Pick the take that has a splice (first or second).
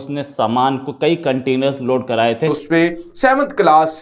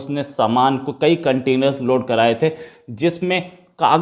first